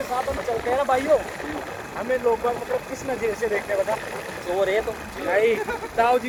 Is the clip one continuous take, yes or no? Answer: yes